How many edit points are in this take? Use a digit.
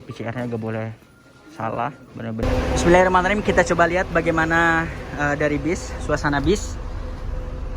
1